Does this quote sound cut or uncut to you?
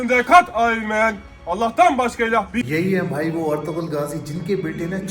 cut